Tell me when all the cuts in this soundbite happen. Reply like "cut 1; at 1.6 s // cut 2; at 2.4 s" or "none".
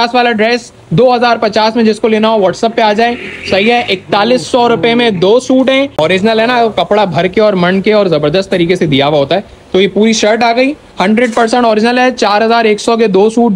cut 1; at 5.9 s